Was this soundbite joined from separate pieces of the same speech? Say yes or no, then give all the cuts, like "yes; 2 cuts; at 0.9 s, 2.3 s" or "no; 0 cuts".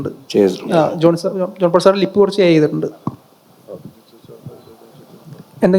no; 0 cuts